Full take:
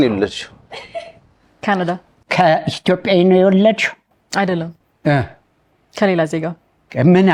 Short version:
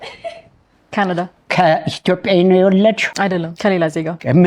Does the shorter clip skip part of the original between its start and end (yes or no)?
yes